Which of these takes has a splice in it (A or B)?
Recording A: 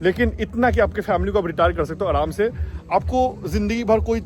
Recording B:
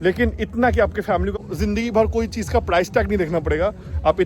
B